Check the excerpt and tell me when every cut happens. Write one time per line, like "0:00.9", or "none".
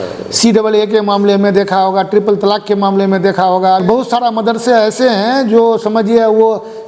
0:03.8